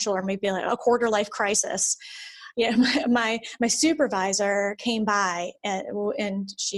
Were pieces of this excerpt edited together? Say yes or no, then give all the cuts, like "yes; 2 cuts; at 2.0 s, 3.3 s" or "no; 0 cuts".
no; 0 cuts